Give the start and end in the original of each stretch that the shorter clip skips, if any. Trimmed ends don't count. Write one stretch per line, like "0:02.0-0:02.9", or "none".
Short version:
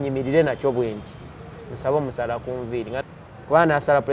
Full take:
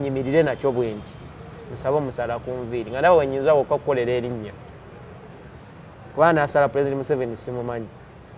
0:03.0-0:05.7